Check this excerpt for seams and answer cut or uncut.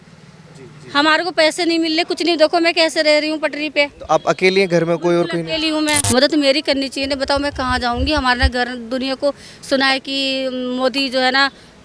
cut